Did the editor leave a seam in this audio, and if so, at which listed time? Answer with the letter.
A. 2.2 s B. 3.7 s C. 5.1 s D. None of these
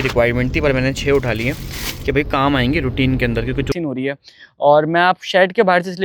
B